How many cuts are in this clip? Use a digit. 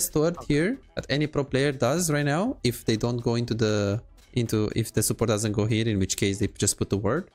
1